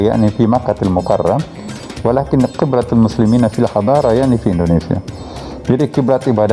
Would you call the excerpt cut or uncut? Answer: uncut